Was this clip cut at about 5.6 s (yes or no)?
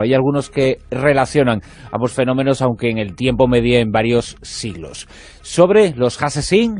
no